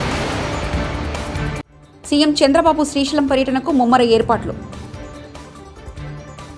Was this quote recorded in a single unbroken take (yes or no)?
yes